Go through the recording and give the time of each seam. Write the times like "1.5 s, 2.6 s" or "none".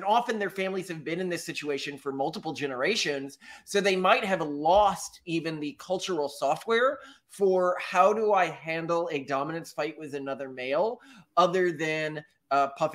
none